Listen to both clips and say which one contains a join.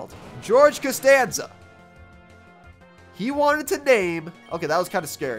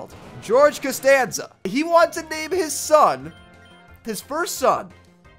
second; 1 cut; at 1.7 s

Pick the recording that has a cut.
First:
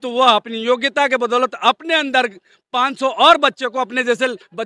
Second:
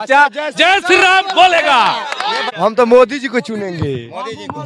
second; 1 cut; at 2.4 s

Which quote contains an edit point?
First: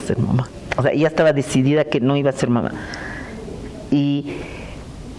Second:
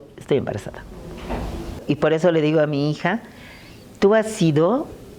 second; 1 cut; at 1.8 s

